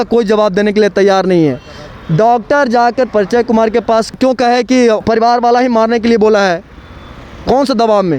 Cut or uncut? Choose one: uncut